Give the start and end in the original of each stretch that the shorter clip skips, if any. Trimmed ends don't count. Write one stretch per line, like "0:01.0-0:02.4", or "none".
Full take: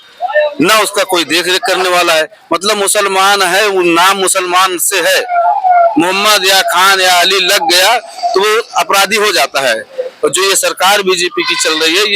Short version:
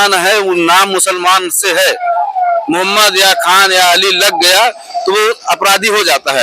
none